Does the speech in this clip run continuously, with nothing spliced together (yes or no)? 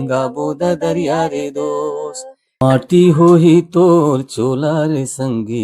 no